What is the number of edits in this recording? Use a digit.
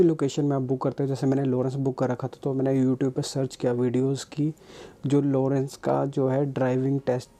0